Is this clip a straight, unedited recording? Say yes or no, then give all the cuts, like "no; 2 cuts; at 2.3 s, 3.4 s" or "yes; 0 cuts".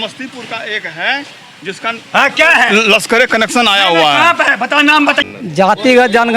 no; 1 cut; at 5.2 s